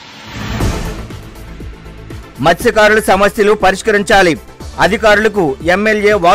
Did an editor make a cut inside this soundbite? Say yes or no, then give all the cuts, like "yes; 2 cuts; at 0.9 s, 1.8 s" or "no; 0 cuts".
no; 0 cuts